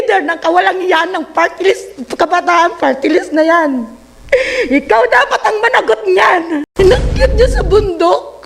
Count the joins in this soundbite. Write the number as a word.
one